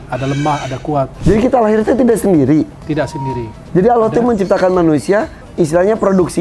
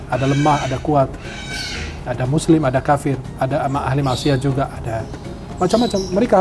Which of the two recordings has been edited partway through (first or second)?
first